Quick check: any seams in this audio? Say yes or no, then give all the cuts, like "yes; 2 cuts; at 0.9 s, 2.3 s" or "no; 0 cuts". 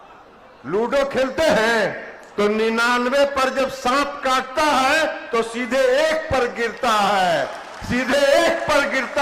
no; 0 cuts